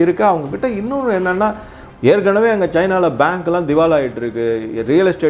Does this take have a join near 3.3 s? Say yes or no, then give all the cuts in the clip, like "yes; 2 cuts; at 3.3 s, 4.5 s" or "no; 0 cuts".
no; 1 cut; at 1.8 s